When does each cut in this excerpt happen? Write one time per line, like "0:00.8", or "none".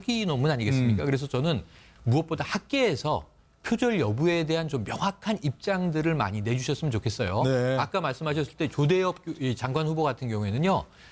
0:05.6